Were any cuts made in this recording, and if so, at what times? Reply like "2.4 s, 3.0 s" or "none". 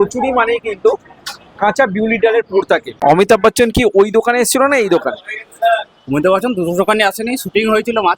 2.9 s

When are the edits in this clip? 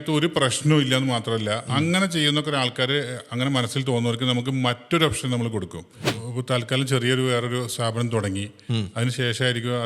6.1 s

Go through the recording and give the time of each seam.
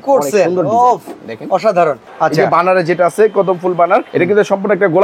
2.1 s, 4.1 s

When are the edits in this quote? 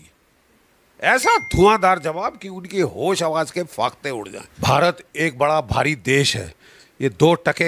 4.4 s

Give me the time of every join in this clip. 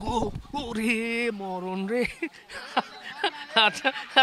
none

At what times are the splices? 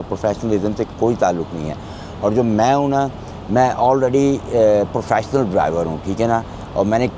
none

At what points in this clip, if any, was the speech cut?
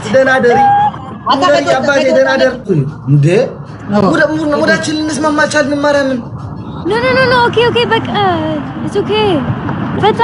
2.7 s

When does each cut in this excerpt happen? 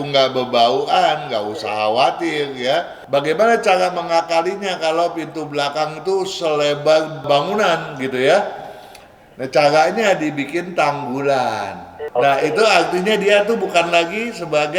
3.0 s, 11.9 s

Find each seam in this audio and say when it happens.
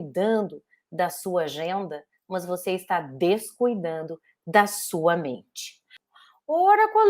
6.0 s

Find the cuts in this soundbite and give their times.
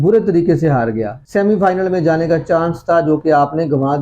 1.1 s

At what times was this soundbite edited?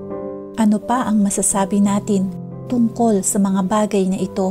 none

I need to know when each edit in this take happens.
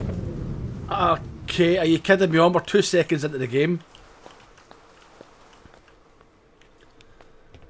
none

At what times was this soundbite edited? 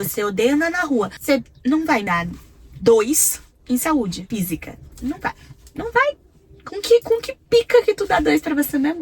1.2 s, 2.1 s, 4.2 s

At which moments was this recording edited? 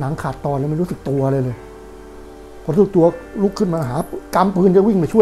none

